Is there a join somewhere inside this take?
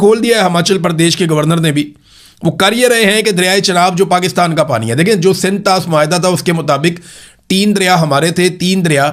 no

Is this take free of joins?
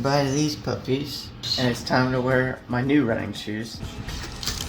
no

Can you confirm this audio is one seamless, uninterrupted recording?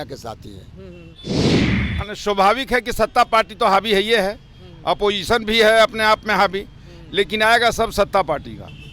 no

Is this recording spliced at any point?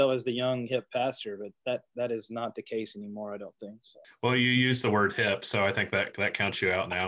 no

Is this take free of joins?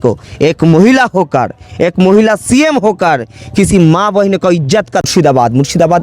no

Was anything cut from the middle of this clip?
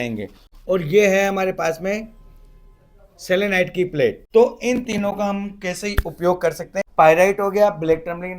yes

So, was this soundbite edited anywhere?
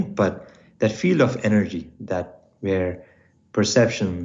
no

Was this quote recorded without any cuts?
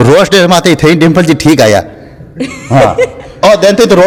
yes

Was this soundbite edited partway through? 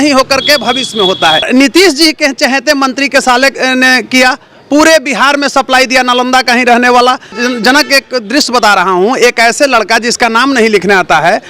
yes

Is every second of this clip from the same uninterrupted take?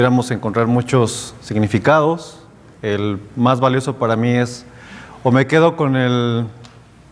yes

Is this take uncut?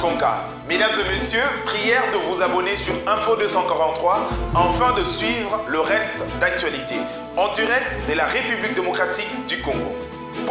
yes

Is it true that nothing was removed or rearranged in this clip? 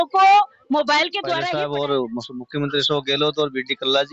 no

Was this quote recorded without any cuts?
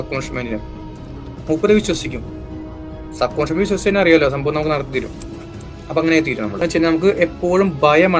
no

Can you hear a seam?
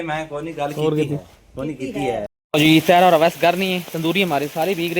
yes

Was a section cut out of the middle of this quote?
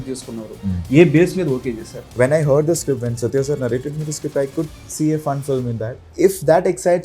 yes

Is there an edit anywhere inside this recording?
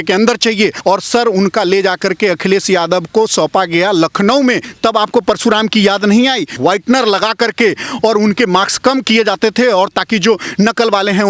yes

